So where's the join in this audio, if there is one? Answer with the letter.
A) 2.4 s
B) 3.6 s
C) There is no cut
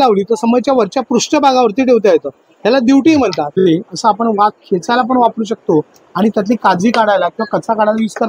B